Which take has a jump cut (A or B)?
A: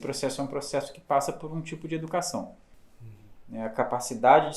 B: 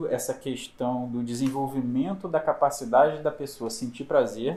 A